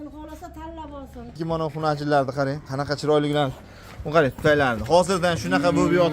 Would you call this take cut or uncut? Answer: cut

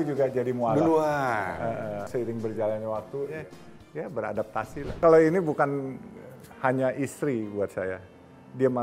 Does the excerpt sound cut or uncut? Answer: cut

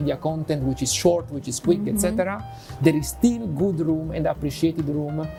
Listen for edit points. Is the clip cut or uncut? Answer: uncut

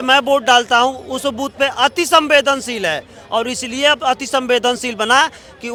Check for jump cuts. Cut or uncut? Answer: uncut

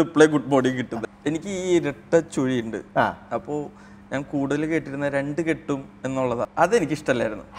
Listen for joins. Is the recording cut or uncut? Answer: cut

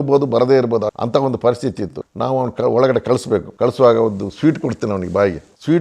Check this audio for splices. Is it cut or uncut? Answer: cut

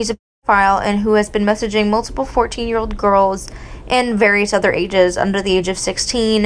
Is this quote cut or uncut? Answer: uncut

